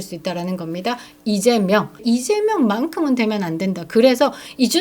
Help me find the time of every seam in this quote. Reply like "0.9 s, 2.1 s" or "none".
2.0 s